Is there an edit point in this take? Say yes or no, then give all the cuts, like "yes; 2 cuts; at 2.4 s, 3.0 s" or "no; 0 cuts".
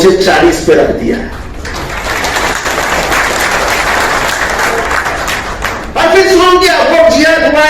yes; 1 cut; at 5.9 s